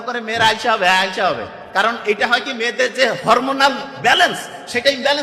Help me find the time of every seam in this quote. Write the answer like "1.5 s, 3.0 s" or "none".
none